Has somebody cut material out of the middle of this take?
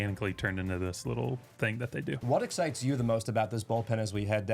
yes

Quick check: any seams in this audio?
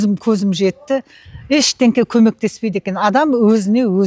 no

